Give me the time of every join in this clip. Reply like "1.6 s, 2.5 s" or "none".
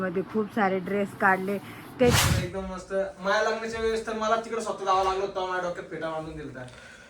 2.1 s